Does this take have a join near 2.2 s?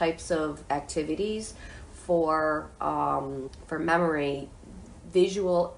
no; 1 cut; at 3.5 s

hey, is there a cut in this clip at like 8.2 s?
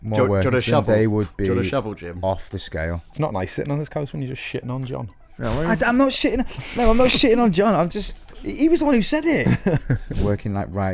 no; 2 cuts; at 3.0 s, 10.0 s

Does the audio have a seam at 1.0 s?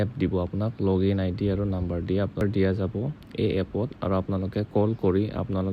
no; 1 cut; at 2.4 s

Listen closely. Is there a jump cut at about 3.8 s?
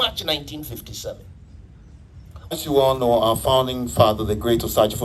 no; 1 cut; at 2.5 s

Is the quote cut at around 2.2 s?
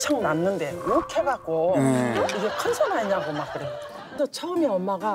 no; 1 cut; at 4.2 s

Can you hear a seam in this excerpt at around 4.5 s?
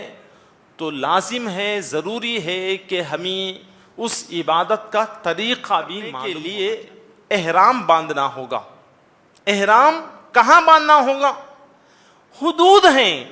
no; 1 cut; at 6.2 s

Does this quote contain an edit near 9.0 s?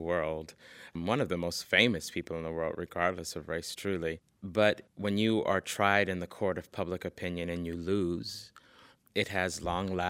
no; 2 cuts; at 0.9 s, 4.3 s

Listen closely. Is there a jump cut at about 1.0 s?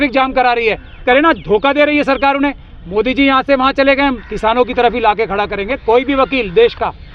yes; 2 cuts; at 1.0 s, 4.3 s

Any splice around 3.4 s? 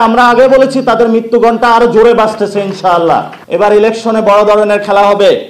yes; 1 cut; at 3.4 s

